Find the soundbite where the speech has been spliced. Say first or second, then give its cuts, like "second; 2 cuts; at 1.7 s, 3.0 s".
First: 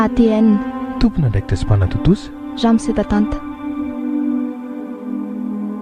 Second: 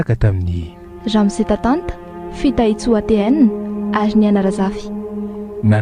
first; 1 cut; at 3.3 s